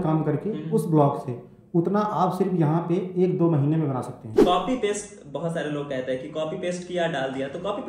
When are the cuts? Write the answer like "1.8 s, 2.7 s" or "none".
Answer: 4.3 s